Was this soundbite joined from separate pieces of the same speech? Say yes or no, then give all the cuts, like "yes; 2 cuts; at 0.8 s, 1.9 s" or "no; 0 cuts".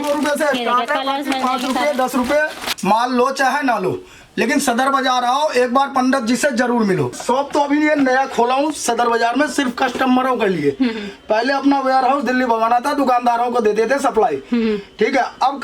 yes; 2 cuts; at 2.8 s, 7.2 s